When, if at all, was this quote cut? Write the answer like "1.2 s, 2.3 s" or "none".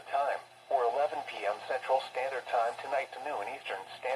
1.0 s